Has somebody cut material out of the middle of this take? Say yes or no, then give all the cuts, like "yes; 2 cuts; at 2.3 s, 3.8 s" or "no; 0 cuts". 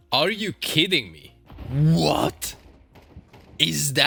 no; 0 cuts